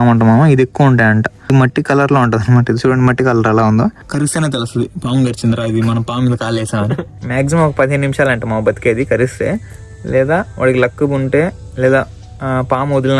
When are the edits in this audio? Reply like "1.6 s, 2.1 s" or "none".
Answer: 1.5 s, 4.0 s, 7.1 s